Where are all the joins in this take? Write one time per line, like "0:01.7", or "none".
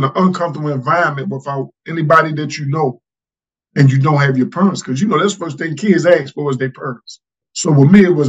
0:07.4